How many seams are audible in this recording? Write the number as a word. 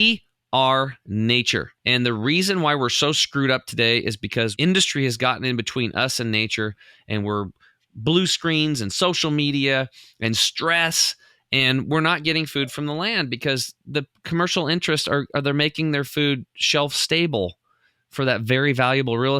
two